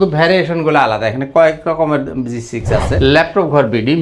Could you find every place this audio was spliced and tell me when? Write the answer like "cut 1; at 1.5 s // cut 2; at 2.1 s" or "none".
cut 1; at 2.9 s